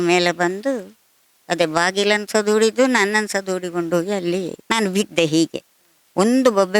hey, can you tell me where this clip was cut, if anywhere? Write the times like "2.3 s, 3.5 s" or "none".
4.6 s